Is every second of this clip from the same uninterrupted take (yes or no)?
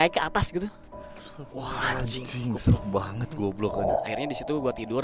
no